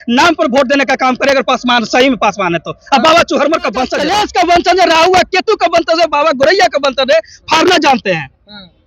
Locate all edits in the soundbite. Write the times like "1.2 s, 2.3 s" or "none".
4.0 s